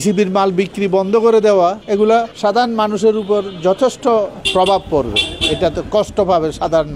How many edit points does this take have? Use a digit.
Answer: 2